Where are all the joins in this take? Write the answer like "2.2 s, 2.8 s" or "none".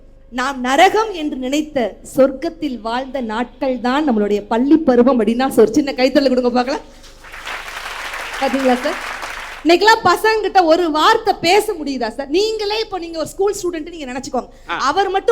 none